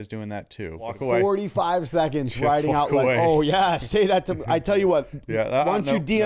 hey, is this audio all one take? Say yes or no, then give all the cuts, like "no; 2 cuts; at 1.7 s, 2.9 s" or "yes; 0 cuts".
no; 1 cut; at 1.0 s